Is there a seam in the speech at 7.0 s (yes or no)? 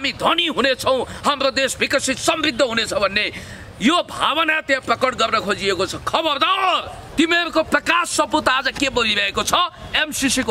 yes